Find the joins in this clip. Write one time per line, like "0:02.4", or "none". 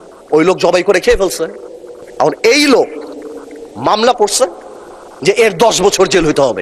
none